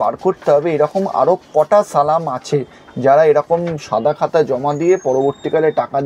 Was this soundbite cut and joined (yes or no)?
no